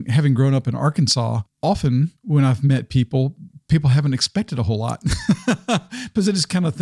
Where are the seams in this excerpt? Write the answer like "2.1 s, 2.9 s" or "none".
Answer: 1.8 s

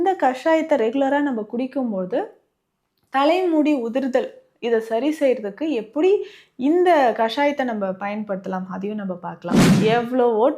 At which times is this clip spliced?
9.6 s

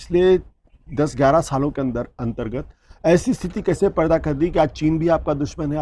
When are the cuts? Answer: none

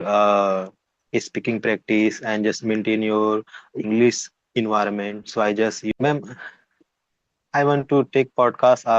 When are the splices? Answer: 5.9 s

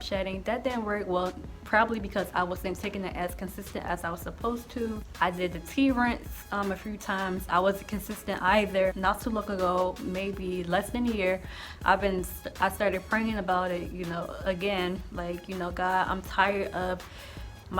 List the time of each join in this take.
none

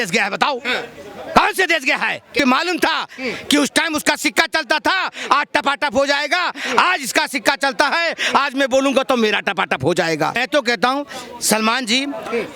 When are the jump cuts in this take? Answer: 2.3 s, 10.3 s

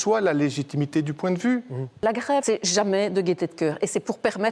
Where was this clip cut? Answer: 1.9 s

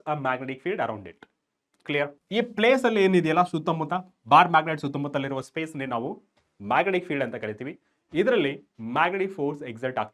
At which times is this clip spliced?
2.2 s

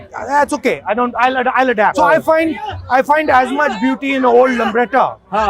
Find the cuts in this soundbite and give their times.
1.9 s

